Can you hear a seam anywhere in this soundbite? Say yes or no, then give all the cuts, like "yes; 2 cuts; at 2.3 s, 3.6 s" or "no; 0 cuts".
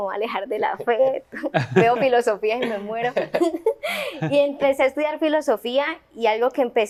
no; 0 cuts